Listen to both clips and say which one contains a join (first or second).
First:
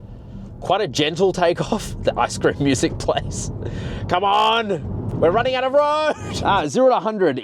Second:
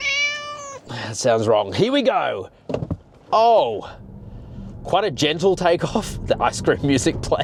first